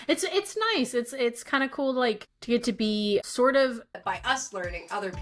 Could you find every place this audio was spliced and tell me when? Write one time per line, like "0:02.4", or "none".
0:02.3
0:03.2
0:03.9